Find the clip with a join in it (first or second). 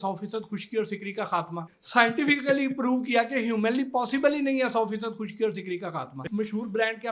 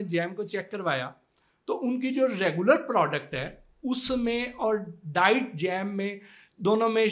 first